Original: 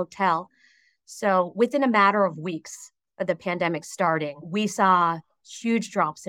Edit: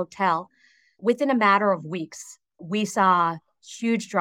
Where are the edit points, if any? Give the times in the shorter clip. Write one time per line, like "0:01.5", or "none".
0:01.0
0:02.5